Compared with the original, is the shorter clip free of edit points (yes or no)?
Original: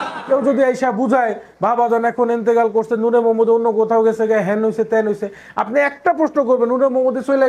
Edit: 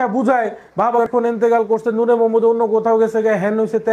no